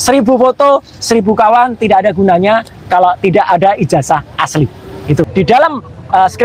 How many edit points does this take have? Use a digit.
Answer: 1